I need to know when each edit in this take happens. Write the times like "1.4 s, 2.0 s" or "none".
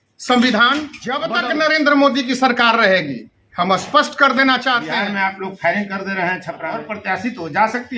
1.2 s, 4.9 s, 6.8 s